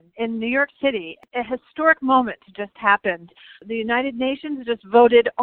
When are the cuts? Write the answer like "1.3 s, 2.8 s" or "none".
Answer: 1.2 s